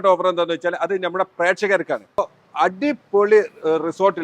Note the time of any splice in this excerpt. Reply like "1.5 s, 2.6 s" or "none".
2.2 s